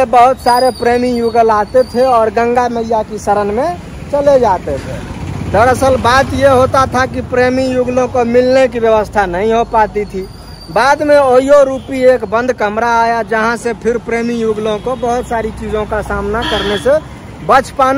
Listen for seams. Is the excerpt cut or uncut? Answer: uncut